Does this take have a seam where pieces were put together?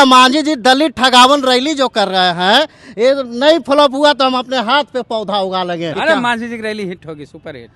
yes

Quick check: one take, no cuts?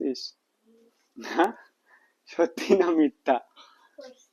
yes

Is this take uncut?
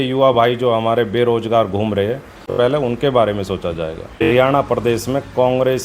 no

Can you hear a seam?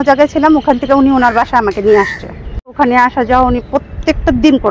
yes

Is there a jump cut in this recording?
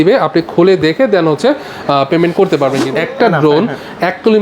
yes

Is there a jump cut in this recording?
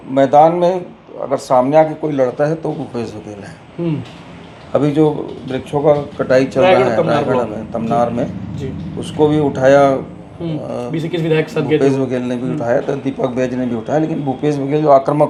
no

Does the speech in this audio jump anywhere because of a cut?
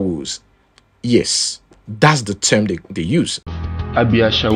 no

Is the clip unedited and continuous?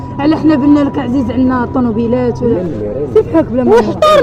no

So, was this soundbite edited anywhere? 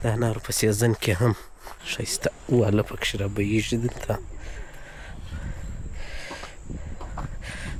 no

